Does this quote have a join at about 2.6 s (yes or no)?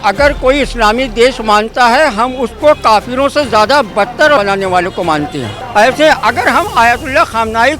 no